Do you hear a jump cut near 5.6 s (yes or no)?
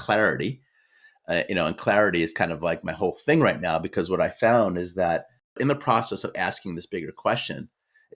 yes